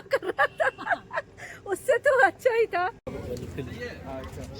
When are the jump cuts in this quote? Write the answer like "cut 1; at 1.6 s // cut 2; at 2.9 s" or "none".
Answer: cut 1; at 3.0 s